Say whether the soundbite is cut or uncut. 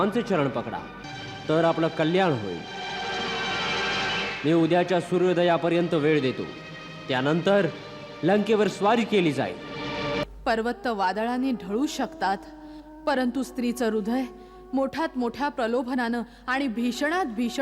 cut